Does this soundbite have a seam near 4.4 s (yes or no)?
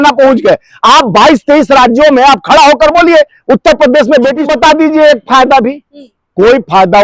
yes